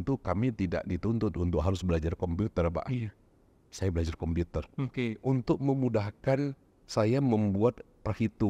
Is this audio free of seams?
yes; 0 cuts

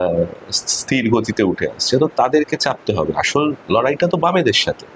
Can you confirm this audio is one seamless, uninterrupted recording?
yes; 0 cuts

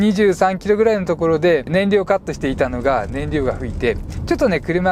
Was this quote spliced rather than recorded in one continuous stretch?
yes; 1 cut; at 1.7 s

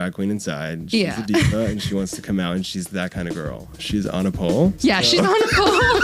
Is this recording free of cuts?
no; 1 cut; at 4.8 s

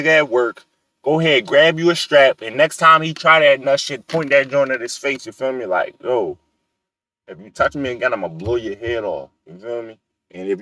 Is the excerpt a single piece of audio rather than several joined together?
yes; 0 cuts

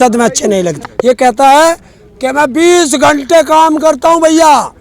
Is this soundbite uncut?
yes; 0 cuts

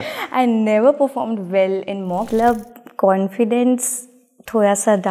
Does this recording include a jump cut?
yes; 1 cut; at 2.3 s

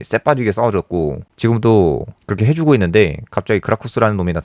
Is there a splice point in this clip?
yes; 1 cut; at 2.2 s

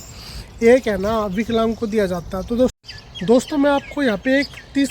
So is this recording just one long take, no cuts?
no; 1 cut; at 2.8 s

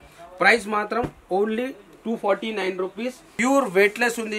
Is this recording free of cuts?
no; 1 cut; at 3.2 s

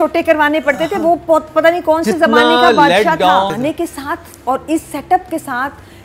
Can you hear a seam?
yes; 1 cut; at 3.5 s

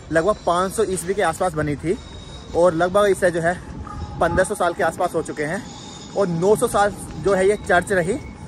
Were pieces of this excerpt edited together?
no; 0 cuts

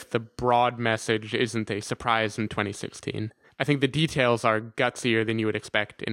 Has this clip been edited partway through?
yes; 1 cut; at 3.6 s

